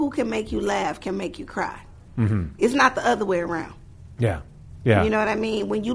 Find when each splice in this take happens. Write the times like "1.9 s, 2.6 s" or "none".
none